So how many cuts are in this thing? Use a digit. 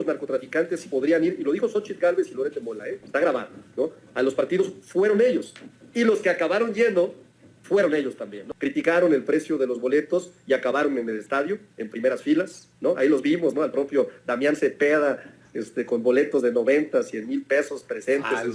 1